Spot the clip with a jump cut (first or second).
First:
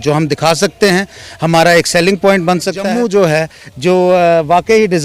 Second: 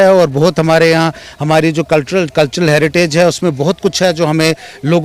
first